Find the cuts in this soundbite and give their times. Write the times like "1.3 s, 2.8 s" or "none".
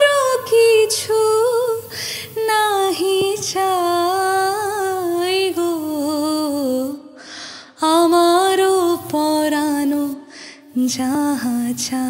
none